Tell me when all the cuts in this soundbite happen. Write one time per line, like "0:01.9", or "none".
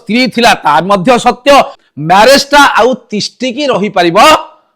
0:01.8